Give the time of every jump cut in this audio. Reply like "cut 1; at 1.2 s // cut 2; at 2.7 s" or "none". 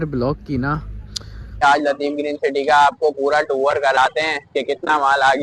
cut 1; at 1.6 s